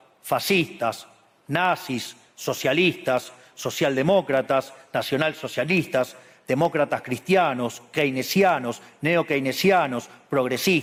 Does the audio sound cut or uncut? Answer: uncut